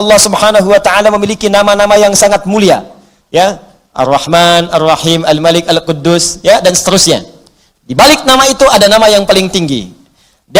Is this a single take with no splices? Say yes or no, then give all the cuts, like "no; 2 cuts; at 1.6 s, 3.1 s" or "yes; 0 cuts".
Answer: yes; 0 cuts